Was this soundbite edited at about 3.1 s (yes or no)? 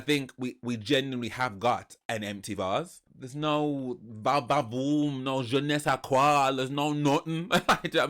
yes